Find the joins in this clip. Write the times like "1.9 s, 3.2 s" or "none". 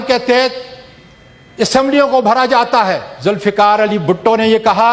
3.1 s